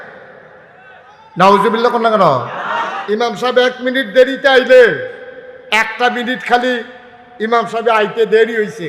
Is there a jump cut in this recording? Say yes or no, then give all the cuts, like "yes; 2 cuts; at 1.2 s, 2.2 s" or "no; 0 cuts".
yes; 1 cut; at 2.9 s